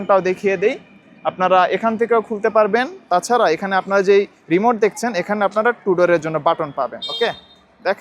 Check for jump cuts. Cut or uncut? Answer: uncut